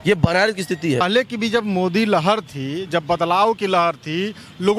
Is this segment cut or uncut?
cut